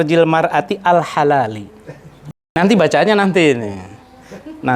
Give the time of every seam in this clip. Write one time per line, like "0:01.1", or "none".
0:02.2